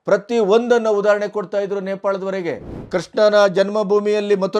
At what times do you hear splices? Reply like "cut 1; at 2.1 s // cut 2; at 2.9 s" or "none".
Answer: cut 1; at 2.7 s